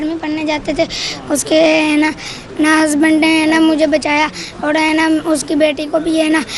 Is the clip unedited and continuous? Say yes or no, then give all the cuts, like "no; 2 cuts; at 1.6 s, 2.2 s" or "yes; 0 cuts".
yes; 0 cuts